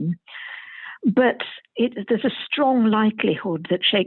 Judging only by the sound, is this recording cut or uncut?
uncut